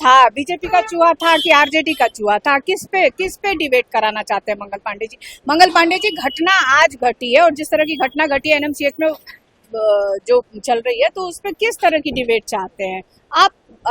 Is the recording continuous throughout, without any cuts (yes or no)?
yes